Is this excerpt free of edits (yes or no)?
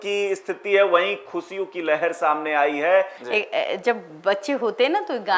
yes